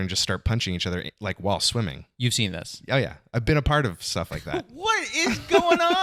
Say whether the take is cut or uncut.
uncut